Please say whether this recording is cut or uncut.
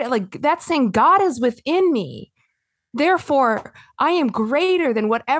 uncut